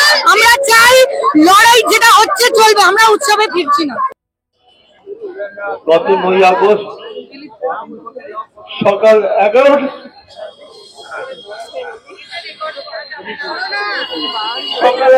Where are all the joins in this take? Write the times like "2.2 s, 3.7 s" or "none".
4.2 s